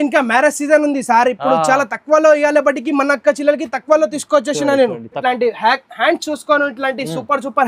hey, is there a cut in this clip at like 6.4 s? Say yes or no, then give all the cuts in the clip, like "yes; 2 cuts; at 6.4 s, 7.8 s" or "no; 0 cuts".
no; 1 cut; at 5.2 s